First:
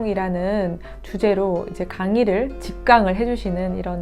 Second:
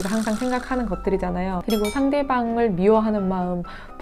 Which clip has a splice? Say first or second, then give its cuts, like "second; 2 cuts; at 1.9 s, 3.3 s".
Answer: second; 1 cut; at 1.6 s